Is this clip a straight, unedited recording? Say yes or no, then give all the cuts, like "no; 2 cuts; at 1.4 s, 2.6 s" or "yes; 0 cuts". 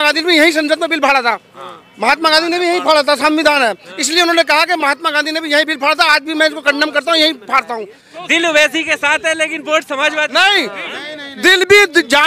no; 1 cut; at 8.1 s